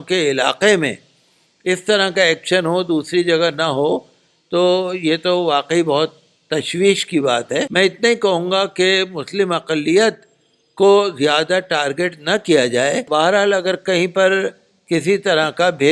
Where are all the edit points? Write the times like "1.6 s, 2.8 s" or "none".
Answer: 7.7 s, 13.0 s